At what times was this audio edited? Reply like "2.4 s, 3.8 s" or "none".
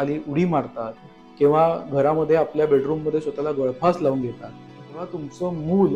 5.0 s